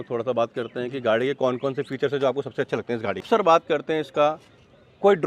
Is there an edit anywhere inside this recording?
yes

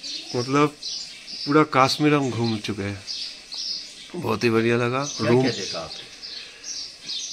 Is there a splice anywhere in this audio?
no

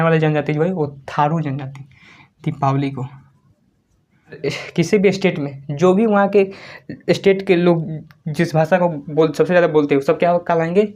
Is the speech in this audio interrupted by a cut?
yes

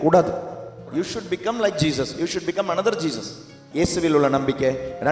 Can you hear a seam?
yes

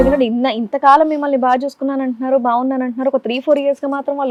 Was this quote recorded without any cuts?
yes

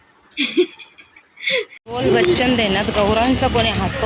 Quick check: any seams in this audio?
yes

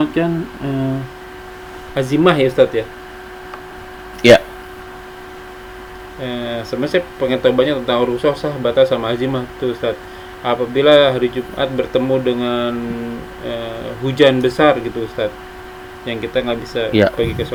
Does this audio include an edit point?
no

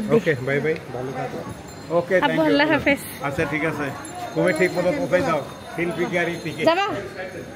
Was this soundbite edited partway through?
no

